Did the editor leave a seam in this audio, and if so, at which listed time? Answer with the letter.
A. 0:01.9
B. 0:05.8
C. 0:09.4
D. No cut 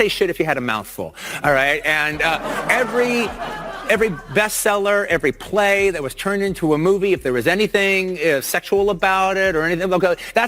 D